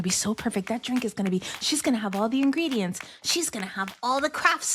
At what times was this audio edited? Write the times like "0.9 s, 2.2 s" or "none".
none

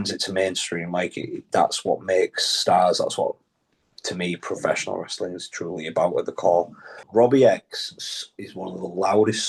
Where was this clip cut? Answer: 7.0 s

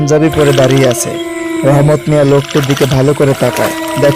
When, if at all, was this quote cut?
none

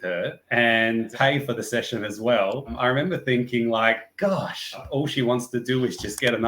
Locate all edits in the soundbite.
1.1 s, 2.7 s, 4.8 s

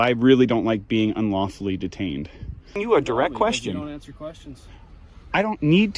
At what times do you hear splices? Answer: 2.7 s

